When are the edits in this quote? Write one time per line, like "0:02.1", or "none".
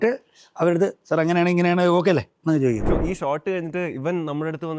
0:02.9